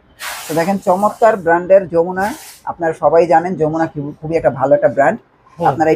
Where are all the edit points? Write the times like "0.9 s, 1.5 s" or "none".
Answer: none